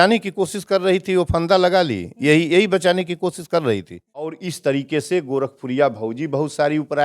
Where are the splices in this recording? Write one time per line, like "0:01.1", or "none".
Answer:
0:04.4